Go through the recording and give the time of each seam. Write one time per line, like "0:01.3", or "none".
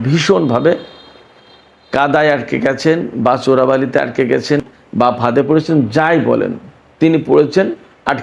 0:04.6